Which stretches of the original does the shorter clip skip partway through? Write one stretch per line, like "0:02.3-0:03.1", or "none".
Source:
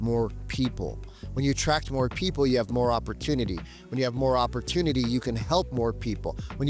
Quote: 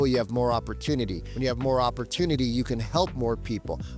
0:03.6-0:03.8